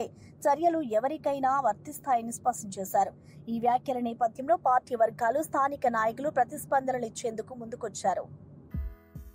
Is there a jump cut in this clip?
yes; 1 cut; at 8.4 s

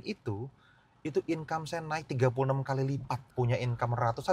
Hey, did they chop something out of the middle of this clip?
yes; 1 cut; at 3.2 s

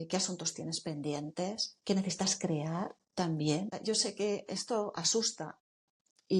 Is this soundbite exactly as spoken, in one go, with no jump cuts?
no; 1 cut; at 3.8 s

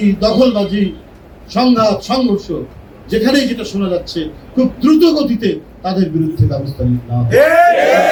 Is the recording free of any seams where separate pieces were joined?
yes; 0 cuts

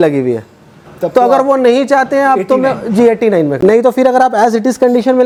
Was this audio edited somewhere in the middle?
no; 0 cuts

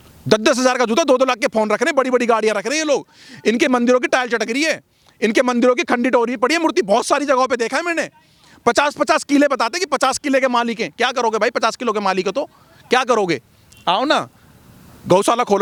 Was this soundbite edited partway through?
no; 0 cuts

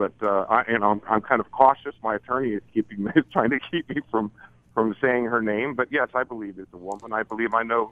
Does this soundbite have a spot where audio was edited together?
no; 0 cuts

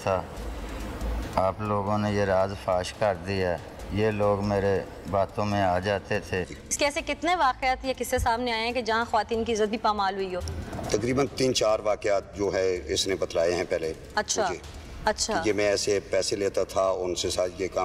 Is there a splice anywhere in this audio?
yes; 1 cut; at 6.5 s

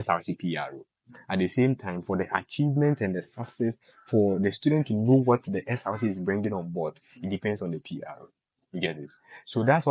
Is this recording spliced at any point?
no; 0 cuts

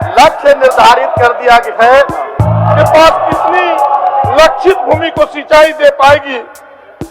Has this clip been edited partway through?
yes; 1 cut; at 2.4 s

